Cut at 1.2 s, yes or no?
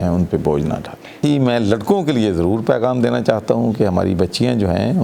yes